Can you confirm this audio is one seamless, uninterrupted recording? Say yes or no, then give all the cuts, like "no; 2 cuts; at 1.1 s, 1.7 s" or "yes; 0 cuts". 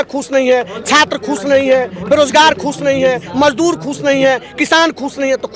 yes; 0 cuts